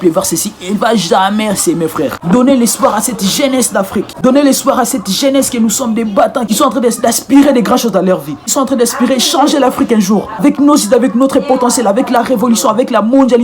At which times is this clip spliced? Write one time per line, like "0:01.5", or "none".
0:02.2
0:06.5
0:10.4